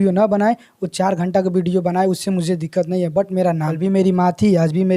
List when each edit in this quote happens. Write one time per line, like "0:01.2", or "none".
0:03.7